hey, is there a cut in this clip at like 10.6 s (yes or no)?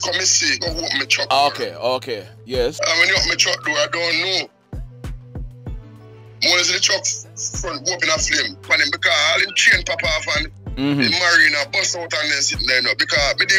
no